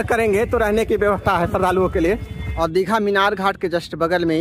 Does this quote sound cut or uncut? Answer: cut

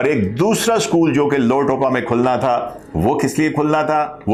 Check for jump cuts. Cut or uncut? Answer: uncut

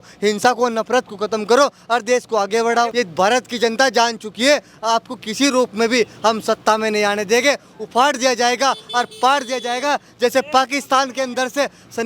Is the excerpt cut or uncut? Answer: cut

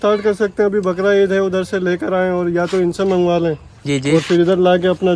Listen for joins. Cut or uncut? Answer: uncut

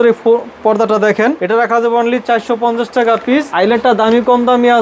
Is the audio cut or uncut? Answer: cut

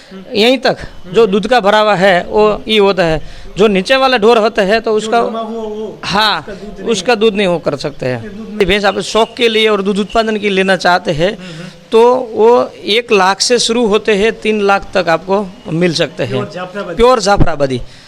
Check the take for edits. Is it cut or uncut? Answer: cut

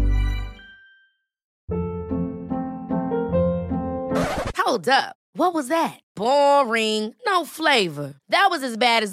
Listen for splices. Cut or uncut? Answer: cut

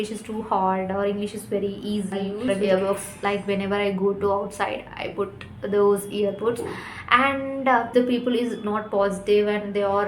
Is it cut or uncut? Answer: cut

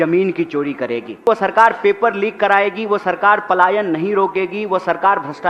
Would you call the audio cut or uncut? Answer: cut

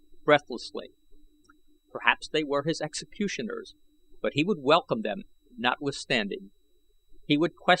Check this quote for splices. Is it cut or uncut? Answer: cut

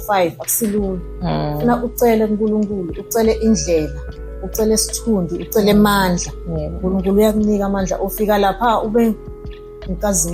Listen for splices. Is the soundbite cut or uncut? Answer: uncut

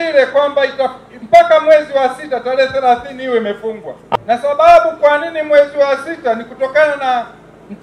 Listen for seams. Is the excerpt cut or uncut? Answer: cut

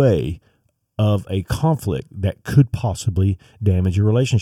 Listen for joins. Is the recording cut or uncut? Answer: uncut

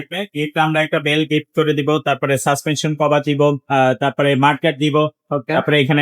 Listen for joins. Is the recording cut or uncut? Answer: uncut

